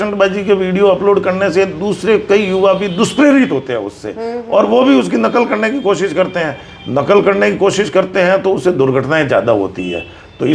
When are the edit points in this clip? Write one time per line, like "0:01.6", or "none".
none